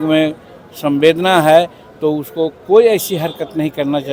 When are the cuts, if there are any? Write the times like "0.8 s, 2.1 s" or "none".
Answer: none